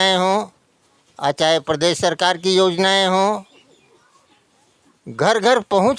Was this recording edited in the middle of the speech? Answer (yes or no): no